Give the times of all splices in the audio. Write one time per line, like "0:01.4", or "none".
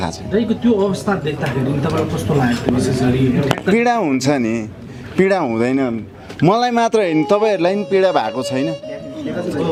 none